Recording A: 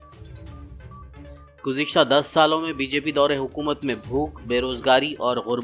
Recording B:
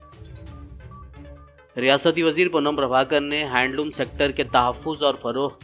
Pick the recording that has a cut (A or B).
A